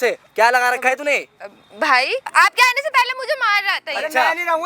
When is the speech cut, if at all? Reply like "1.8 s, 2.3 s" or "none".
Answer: 2.2 s